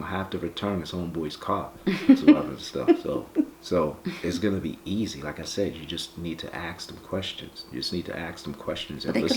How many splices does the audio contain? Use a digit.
1